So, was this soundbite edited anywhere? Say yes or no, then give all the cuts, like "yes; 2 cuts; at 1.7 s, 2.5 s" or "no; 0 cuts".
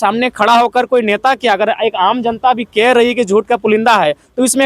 no; 0 cuts